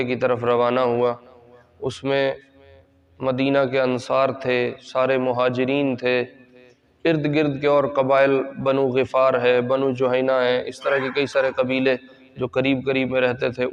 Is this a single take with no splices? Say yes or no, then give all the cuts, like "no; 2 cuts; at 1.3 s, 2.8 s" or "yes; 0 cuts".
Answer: yes; 0 cuts